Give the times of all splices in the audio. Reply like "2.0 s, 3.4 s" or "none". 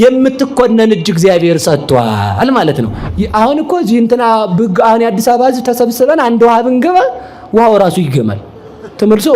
3.0 s